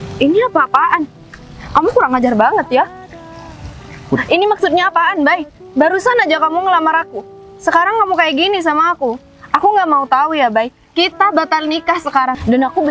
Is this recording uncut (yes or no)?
yes